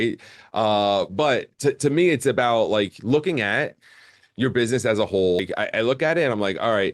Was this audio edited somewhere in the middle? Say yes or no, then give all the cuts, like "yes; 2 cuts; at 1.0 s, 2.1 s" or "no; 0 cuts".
yes; 1 cut; at 5.5 s